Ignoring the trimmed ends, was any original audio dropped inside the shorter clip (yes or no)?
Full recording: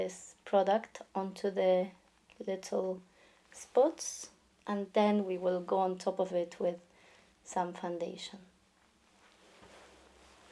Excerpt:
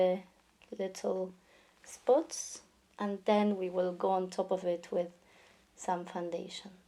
no